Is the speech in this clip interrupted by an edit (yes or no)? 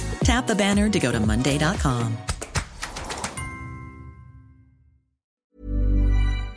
yes